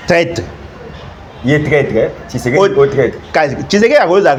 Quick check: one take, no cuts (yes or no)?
yes